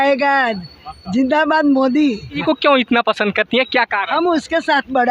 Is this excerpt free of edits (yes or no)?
no